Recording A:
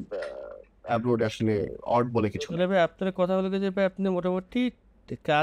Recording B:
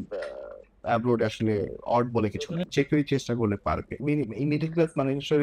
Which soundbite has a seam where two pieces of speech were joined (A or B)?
B